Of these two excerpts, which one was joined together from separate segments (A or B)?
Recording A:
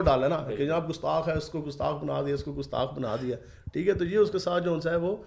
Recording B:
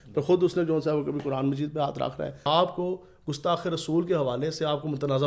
B